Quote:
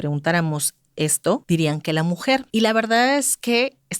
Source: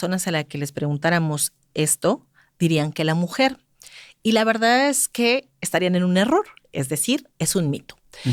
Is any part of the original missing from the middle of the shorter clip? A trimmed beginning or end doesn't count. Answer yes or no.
yes